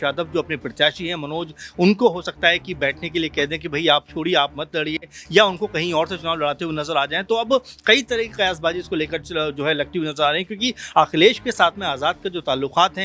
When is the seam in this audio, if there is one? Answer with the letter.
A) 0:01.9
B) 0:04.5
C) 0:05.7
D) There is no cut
D